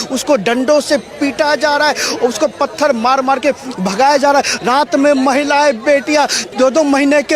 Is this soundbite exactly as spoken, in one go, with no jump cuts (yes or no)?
no